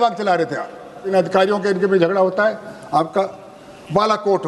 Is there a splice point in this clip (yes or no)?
yes